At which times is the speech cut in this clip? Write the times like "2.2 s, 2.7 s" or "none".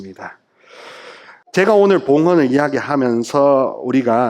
1.4 s